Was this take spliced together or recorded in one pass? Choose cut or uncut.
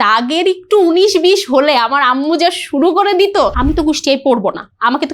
cut